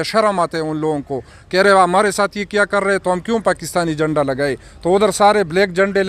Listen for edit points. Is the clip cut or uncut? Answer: uncut